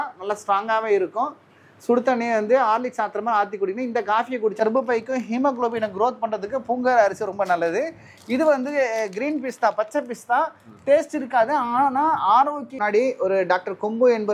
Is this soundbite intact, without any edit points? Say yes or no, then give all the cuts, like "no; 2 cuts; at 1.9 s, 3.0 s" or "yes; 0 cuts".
no; 2 cuts; at 4.6 s, 12.7 s